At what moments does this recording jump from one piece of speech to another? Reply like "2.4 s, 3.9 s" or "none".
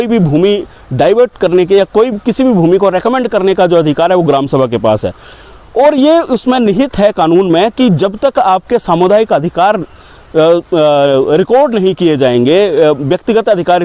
none